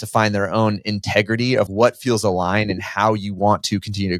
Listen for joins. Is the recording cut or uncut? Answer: cut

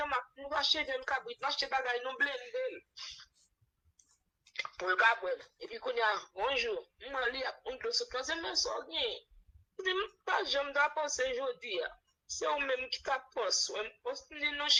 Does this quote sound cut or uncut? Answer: uncut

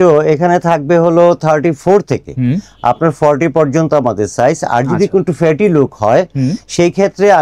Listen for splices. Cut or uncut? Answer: uncut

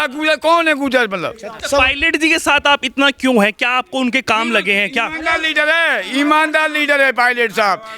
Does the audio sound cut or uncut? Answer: cut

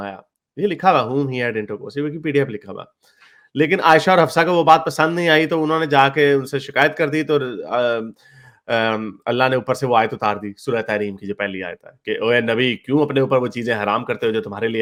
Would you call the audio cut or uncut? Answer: uncut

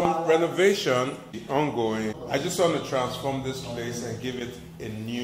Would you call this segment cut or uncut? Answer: cut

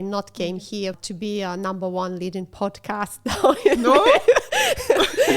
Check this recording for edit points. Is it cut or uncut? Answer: cut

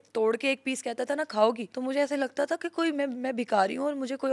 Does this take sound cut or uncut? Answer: cut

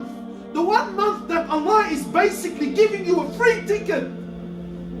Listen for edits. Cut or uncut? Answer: uncut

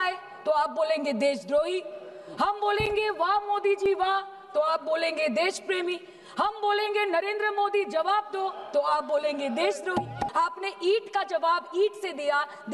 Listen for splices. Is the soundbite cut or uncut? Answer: cut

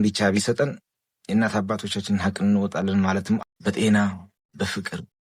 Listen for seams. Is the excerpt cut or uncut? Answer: cut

